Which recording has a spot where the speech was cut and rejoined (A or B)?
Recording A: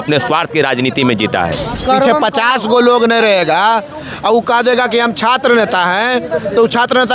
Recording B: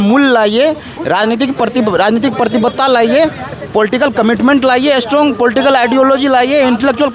A